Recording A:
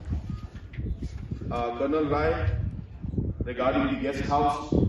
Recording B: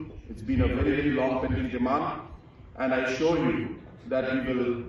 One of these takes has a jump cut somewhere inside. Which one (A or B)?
A